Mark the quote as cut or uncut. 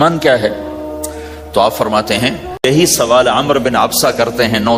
cut